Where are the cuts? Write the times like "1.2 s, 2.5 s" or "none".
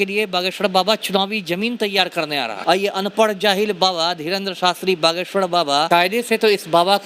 2.5 s, 5.9 s